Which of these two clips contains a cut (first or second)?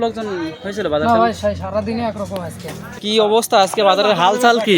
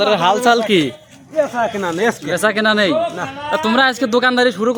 first